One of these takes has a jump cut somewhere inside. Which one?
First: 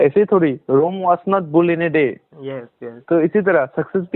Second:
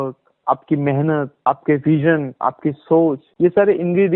second; 2 cuts; at 1.4 s, 3.3 s

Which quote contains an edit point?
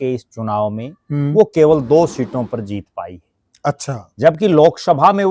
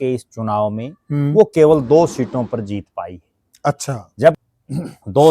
second; 1 cut; at 4.4 s

